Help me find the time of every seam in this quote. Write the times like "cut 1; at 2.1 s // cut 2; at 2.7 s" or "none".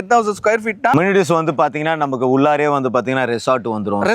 cut 1; at 0.9 s

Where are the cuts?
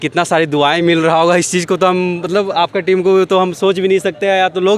none

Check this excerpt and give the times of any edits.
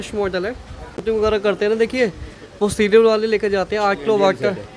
cut 1; at 0.9 s

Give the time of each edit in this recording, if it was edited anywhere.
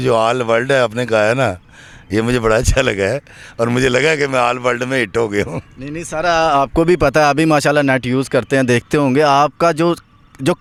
none

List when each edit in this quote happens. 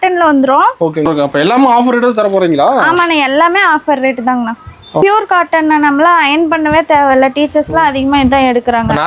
cut 1; at 1.1 s // cut 2; at 5.0 s

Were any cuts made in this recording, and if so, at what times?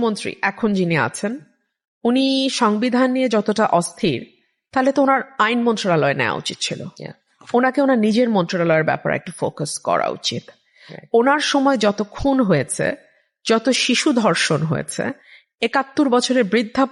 none

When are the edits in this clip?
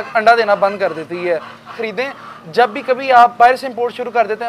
cut 1; at 1.8 s

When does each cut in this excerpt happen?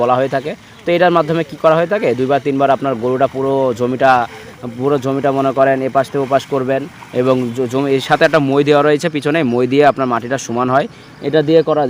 none

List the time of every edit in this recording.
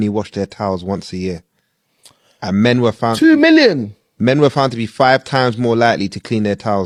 none

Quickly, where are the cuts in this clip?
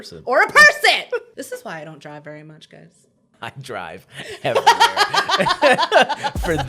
cut 1; at 1.3 s // cut 2; at 3.3 s

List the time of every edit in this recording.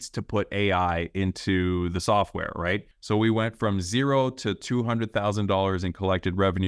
cut 1; at 2.9 s

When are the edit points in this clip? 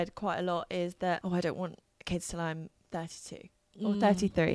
cut 1; at 1.2 s

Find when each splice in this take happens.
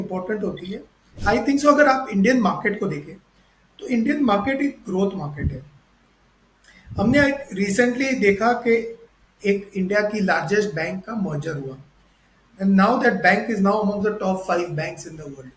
cut 1; at 1.1 s

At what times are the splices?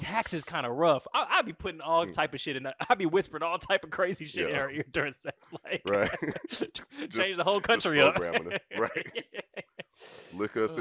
none

